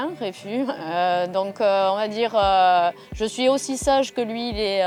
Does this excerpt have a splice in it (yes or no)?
no